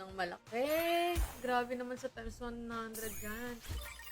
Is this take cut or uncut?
uncut